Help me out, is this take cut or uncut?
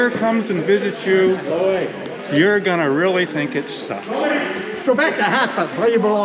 uncut